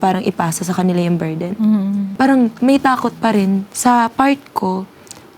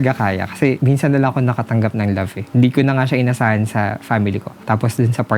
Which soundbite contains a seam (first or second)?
first